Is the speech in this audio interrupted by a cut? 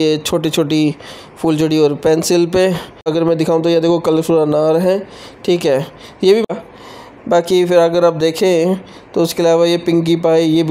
yes; 2 cuts; at 3.1 s, 6.5 s

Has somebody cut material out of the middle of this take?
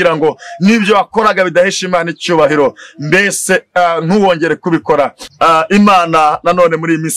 yes; 1 cut; at 5.2 s

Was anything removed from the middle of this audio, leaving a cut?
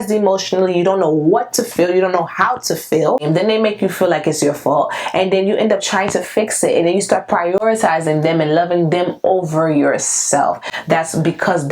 yes; 1 cut; at 3.2 s

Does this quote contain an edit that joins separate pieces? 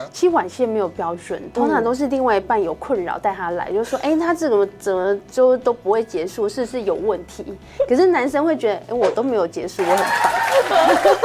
no; 0 cuts

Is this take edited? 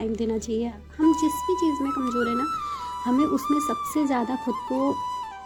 no; 0 cuts

